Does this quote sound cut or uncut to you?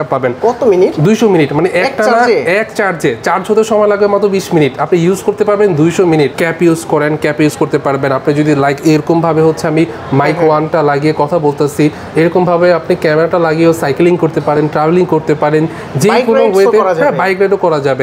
cut